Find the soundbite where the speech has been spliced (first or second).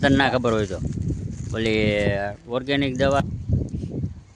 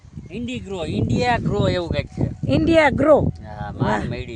first